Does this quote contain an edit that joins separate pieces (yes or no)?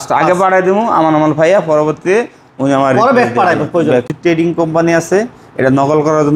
yes